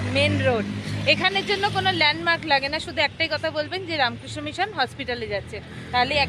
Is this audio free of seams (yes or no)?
yes